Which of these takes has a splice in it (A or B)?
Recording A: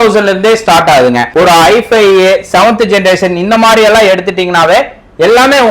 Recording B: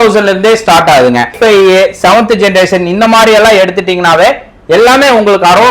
B